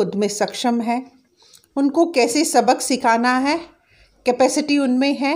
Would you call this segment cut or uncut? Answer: uncut